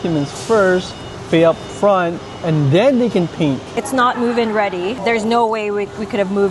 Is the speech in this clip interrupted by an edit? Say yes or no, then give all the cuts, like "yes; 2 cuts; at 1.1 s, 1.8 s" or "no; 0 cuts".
yes; 2 cuts; at 3.8 s, 5.0 s